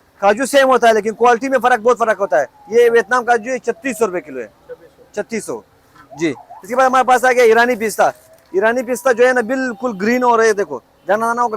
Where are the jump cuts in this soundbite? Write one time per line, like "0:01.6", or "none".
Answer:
none